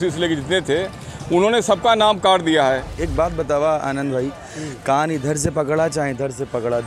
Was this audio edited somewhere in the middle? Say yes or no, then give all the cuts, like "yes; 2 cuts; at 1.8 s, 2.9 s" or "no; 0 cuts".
yes; 1 cut; at 2.9 s